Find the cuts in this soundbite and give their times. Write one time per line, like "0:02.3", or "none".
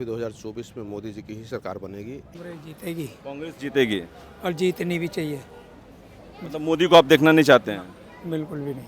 0:02.3